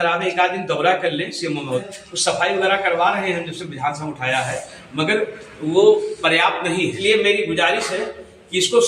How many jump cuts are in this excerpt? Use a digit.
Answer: 2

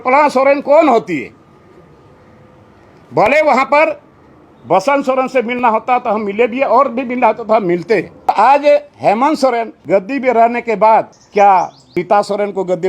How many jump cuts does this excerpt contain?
4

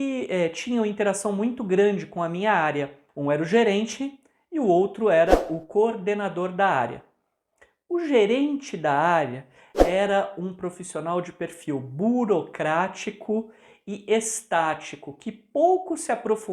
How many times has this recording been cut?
1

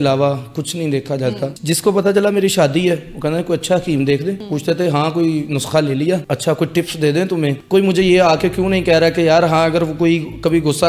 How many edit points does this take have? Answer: 4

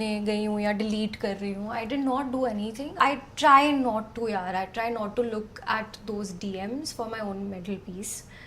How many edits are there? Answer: 1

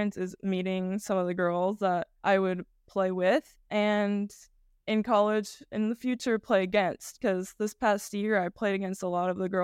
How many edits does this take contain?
2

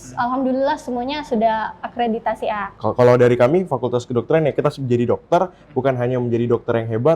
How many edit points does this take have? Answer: 1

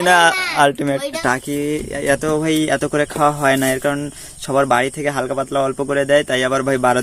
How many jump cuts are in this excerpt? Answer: 1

